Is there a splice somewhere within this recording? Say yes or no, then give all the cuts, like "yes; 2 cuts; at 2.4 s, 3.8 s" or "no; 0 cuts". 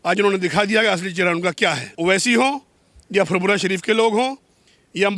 yes; 1 cut; at 1.9 s